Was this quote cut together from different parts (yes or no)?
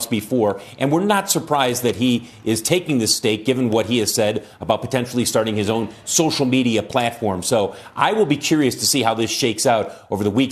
no